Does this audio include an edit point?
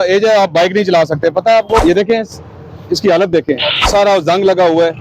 yes; 2 cuts; at 1.8 s, 3.8 s

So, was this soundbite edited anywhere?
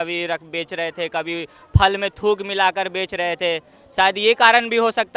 no; 0 cuts

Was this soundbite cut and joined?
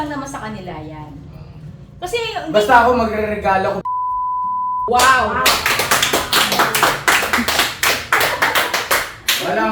no; 0 cuts

